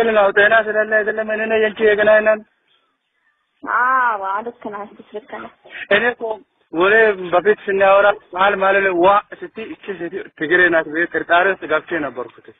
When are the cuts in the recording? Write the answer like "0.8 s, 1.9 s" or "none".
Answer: none